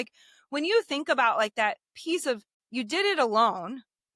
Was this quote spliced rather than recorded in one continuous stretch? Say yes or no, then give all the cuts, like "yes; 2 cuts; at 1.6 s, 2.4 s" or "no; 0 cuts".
yes; 1 cut; at 2.6 s